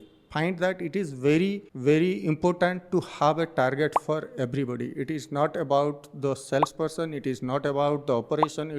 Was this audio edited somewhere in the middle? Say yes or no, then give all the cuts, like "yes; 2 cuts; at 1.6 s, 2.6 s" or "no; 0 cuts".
yes; 1 cut; at 1.7 s